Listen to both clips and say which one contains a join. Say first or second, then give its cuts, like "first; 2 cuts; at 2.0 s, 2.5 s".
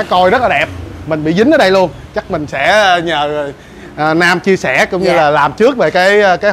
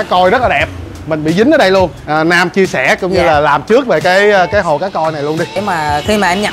second; 2 cuts; at 2.0 s, 5.5 s